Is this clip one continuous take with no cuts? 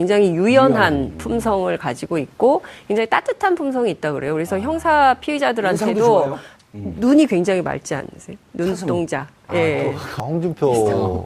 yes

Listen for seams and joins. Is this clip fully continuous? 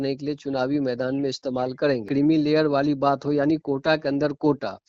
no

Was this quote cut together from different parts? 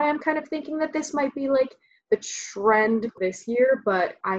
yes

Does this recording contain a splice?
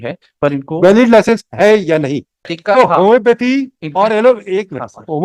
yes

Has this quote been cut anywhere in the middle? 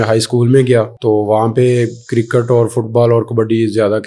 yes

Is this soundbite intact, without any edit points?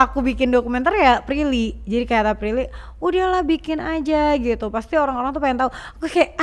yes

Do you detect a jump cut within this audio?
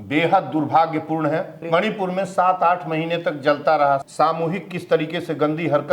yes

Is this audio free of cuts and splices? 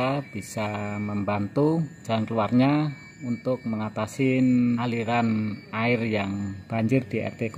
no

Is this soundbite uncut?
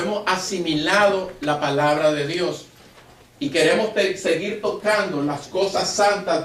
yes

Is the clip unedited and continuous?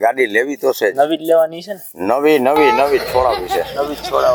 yes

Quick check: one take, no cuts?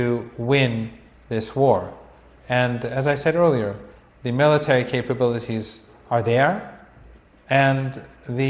no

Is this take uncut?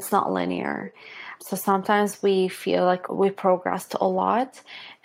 no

